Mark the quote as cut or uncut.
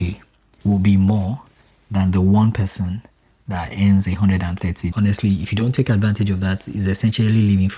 cut